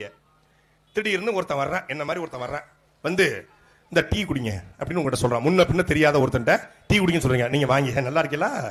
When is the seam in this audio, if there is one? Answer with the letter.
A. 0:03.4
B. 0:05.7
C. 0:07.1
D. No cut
D